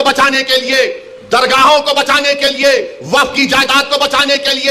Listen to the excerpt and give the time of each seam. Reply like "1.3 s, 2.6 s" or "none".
none